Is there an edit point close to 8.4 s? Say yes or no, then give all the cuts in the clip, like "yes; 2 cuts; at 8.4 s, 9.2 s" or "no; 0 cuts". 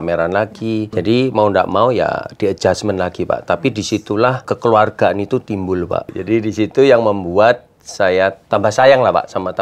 yes; 4 cuts; at 0.9 s, 4.5 s, 6.1 s, 8.4 s